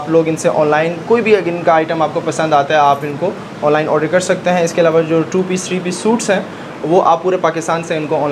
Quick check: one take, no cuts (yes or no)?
yes